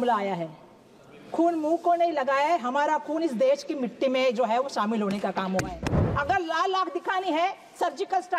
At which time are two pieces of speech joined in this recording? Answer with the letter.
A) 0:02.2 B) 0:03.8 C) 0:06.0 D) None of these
C